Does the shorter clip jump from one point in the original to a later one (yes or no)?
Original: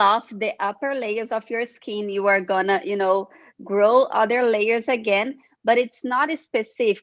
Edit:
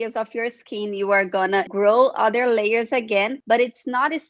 yes